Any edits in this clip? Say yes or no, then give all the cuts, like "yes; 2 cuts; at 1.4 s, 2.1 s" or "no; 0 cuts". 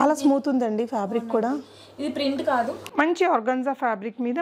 yes; 1 cut; at 2.8 s